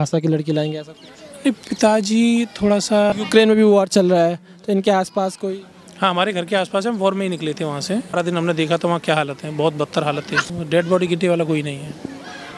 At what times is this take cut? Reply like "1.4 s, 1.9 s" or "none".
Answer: 3.1 s, 8.2 s, 10.5 s